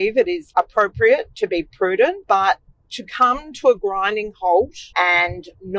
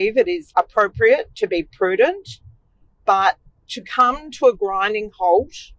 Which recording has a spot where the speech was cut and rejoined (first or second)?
first